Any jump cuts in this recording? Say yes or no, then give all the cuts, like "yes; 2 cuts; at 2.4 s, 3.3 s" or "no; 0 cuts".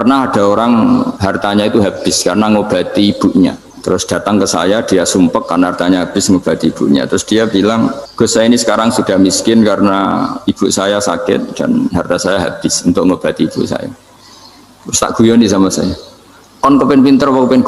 yes; 3 cuts; at 1.2 s, 3.7 s, 8.0 s